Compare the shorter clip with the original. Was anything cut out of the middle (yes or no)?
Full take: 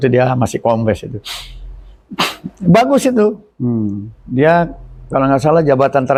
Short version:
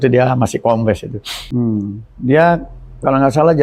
yes